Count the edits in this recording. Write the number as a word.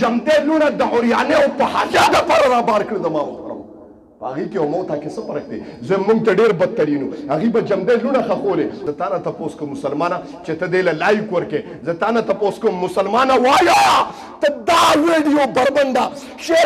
one